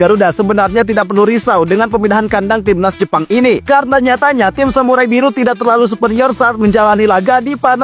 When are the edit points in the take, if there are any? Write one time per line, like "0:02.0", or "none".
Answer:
none